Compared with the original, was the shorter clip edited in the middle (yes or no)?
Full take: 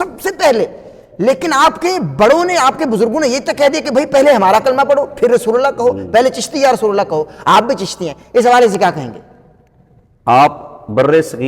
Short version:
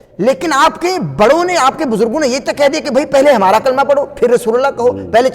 no